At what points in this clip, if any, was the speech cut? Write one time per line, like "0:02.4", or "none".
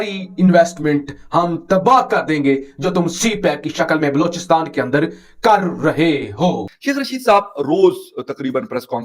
0:06.7